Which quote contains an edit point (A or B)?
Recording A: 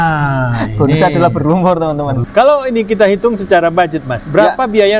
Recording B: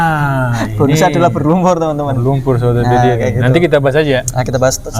A